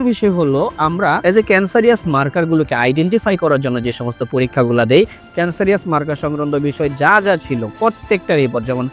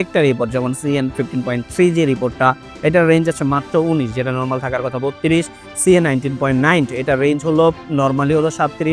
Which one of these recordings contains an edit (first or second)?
first